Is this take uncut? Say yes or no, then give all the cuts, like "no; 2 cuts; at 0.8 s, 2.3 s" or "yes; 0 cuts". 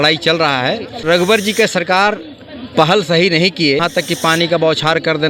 no; 2 cuts; at 1.0 s, 3.9 s